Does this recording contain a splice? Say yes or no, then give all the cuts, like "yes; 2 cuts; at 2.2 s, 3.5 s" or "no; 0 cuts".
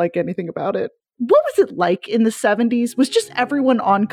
yes; 1 cut; at 1.1 s